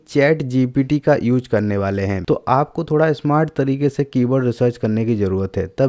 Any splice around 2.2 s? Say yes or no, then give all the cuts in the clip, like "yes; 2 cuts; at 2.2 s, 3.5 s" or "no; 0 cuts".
yes; 1 cut; at 2.2 s